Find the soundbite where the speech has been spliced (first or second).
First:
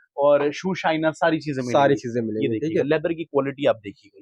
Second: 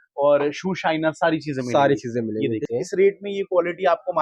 second